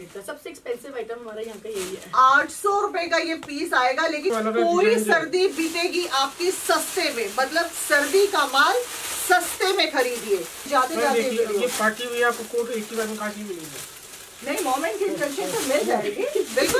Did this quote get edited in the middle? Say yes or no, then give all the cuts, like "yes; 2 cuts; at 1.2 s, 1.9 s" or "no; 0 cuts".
yes; 2 cuts; at 4.3 s, 10.6 s